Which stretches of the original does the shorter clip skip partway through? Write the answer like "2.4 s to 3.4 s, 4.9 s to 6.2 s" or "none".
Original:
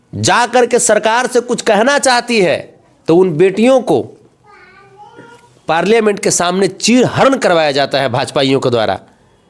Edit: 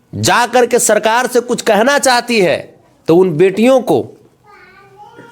none

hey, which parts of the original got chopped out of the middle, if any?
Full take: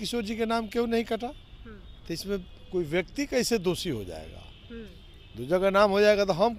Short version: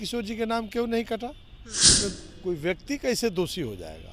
1.9 s to 2.2 s

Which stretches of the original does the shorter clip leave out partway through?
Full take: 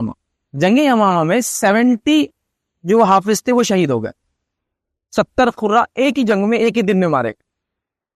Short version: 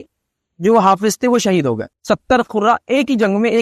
4.2 s to 5.0 s

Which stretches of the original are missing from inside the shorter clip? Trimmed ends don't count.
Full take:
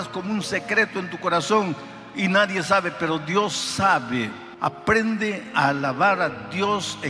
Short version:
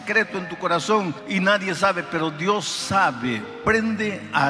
1.8 s to 2.1 s, 4.4 s to 4.8 s

